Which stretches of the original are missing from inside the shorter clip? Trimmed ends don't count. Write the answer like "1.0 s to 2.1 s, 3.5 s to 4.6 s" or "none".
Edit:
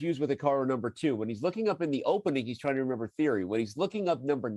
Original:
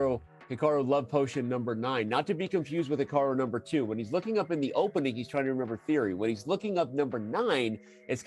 none